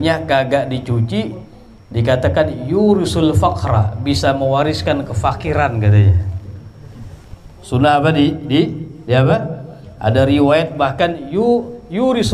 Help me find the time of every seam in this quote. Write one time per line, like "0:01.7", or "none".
none

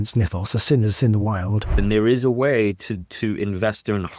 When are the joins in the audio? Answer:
0:01.8

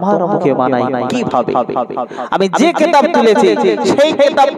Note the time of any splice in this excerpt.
none

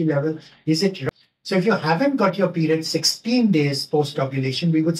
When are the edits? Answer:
0:01.0

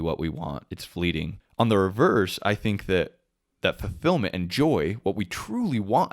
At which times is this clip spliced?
0:01.4

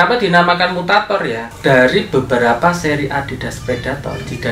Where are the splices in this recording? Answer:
0:01.5

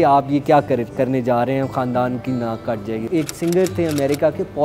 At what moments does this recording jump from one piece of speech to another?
none

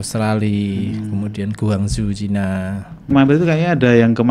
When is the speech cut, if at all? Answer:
0:03.1

